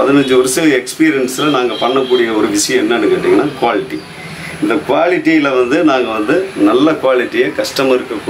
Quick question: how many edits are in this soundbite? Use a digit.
0